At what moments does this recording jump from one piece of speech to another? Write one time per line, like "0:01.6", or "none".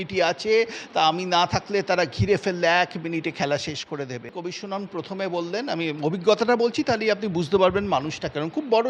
0:04.4

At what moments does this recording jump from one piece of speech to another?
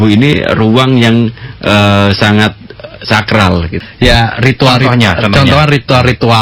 0:03.8

